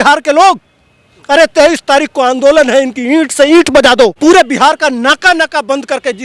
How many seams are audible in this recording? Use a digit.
1